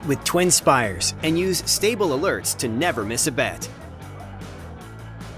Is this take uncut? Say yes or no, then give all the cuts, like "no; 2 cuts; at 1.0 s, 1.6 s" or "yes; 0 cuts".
yes; 0 cuts